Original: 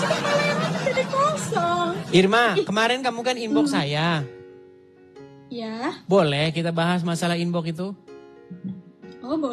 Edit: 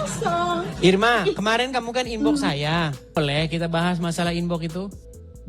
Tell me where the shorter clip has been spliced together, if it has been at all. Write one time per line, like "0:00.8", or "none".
0:03.2